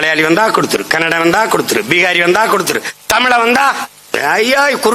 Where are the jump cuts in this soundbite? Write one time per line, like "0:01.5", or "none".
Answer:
none